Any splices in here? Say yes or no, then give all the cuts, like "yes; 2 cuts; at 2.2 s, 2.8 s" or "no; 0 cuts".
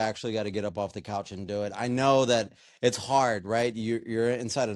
no; 0 cuts